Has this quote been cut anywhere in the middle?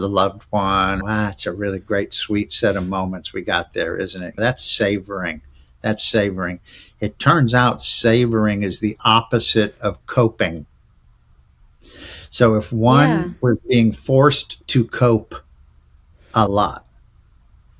yes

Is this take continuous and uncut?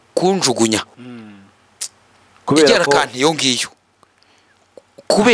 yes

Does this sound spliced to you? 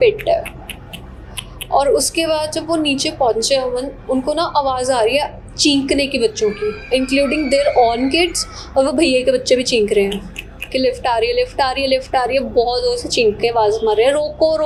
no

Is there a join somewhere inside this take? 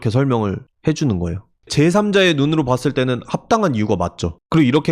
yes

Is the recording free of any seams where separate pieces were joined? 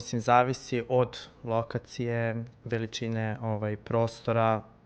yes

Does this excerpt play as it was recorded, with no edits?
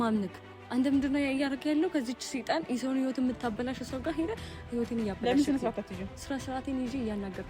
yes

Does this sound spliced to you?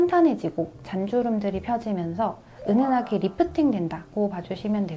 no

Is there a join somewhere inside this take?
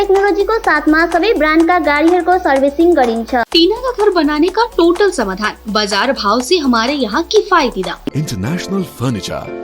yes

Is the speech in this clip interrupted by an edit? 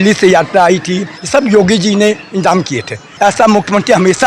yes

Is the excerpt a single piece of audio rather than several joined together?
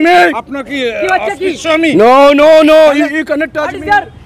yes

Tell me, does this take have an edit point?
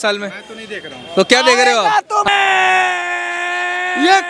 yes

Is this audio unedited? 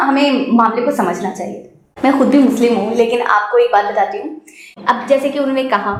yes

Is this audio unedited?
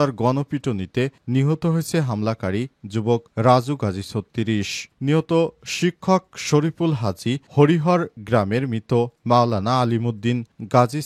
yes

